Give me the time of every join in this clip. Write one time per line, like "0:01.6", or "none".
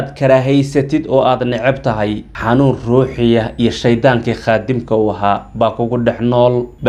none